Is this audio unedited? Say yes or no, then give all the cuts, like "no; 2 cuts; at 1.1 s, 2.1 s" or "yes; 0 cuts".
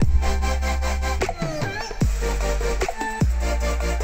yes; 0 cuts